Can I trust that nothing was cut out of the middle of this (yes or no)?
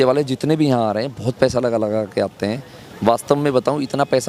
yes